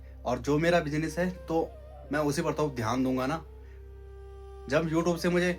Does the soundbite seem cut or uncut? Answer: uncut